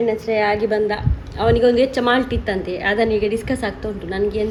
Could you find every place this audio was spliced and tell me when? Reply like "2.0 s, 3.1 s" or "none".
none